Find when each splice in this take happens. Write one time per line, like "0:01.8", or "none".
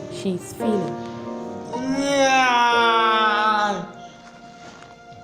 0:01.6